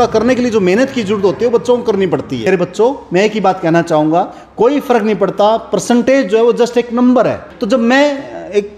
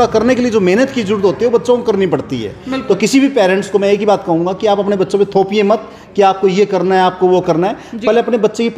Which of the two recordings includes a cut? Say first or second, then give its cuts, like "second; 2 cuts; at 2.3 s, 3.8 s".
first; 2 cuts; at 2.5 s, 7.5 s